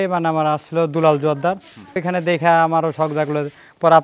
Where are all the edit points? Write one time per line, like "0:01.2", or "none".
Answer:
0:02.0